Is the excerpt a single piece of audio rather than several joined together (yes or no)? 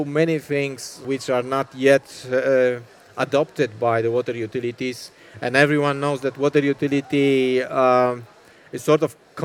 no